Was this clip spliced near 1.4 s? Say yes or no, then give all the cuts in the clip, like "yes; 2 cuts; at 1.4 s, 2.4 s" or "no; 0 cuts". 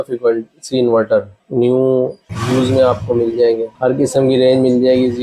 yes; 3 cuts; at 1.4 s, 2.3 s, 3.7 s